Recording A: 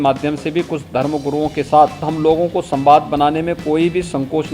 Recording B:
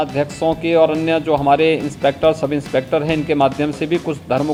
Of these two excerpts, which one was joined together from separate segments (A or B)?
A